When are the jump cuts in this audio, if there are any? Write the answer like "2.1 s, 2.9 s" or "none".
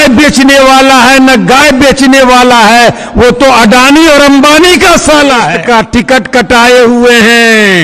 5.5 s